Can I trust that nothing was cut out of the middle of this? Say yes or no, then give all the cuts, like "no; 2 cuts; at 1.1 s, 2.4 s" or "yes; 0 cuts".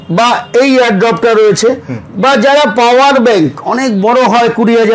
yes; 0 cuts